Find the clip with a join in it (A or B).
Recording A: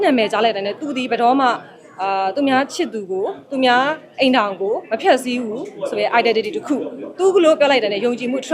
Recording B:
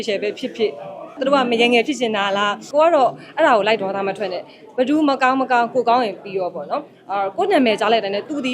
B